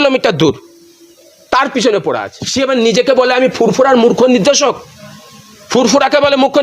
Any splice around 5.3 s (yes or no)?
no